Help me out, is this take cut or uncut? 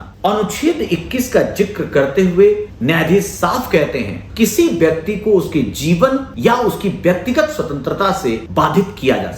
cut